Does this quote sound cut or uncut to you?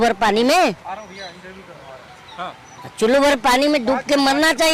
uncut